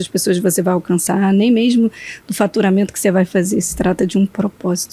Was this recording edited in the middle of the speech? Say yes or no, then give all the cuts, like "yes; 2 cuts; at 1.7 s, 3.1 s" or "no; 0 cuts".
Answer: no; 0 cuts